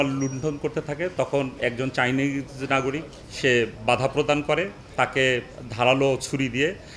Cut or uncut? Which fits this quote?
uncut